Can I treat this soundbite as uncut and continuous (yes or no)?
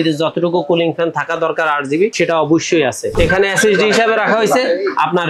no